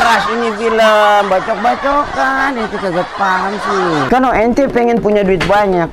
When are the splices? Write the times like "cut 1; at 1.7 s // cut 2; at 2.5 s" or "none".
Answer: cut 1; at 4.1 s